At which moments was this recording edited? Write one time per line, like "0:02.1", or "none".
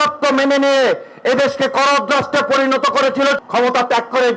0:03.4